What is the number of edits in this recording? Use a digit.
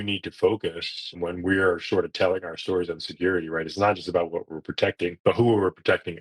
2